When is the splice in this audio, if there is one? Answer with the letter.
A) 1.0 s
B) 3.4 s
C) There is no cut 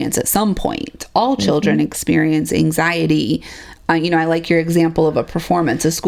C